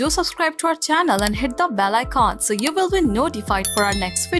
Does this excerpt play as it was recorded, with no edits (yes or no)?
yes